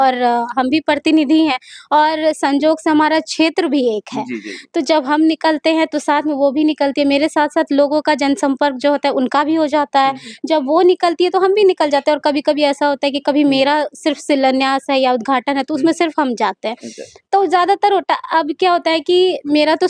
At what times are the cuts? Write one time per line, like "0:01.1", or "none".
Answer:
none